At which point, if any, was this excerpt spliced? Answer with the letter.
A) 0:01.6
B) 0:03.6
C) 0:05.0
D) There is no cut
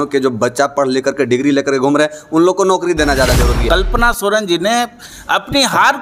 B